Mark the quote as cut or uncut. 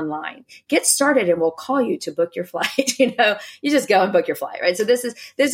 uncut